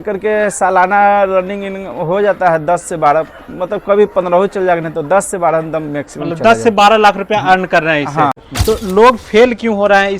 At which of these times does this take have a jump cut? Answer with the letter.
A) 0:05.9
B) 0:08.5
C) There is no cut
B